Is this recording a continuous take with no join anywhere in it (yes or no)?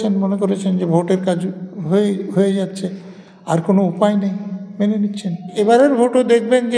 no